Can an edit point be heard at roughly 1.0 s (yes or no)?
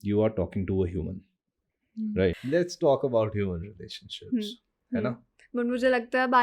no